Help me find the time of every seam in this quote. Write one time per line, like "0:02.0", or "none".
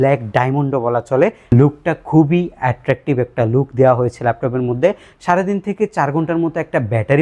0:01.4